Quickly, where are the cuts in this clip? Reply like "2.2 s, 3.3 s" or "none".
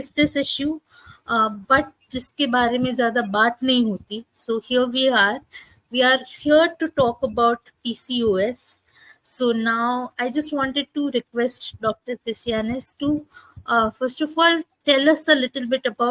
none